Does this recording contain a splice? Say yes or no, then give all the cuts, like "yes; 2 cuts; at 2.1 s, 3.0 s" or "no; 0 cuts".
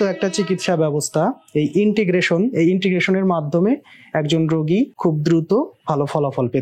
yes; 1 cut; at 4.9 s